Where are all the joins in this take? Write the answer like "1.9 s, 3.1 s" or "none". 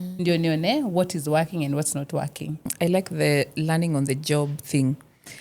2.7 s